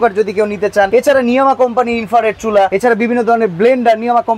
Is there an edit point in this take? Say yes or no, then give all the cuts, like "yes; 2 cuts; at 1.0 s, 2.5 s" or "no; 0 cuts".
yes; 2 cuts; at 0.9 s, 2.7 s